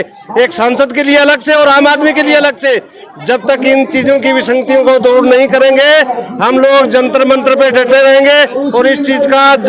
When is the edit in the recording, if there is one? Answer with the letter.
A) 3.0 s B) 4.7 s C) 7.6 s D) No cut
D